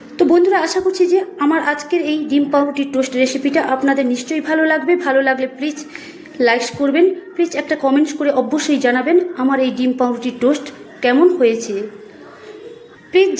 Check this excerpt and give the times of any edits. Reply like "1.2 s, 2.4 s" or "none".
none